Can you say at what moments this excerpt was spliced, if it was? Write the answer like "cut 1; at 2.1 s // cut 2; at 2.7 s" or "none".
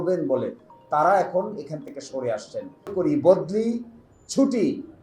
cut 1; at 2.9 s